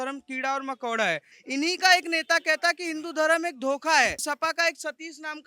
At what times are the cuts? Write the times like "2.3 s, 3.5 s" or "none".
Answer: 1.3 s, 4.2 s